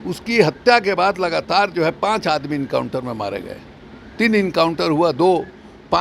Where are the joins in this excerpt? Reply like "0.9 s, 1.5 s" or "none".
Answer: none